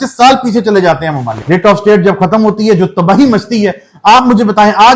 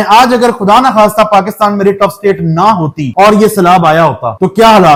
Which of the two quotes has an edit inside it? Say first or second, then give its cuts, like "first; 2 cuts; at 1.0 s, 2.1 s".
first; 1 cut; at 1.3 s